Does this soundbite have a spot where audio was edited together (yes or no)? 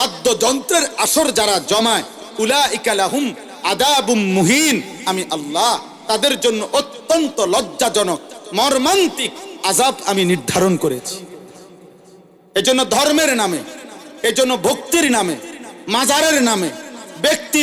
no